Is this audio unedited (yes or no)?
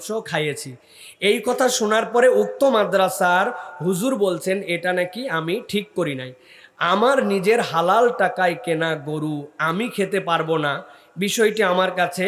yes